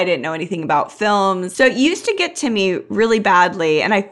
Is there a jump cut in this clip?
yes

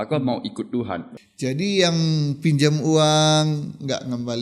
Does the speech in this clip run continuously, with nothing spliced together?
no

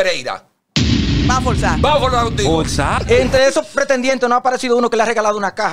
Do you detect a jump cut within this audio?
yes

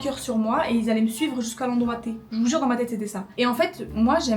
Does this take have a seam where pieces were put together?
no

